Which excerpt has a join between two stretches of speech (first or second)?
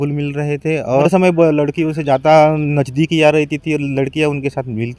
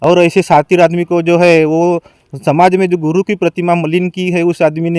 first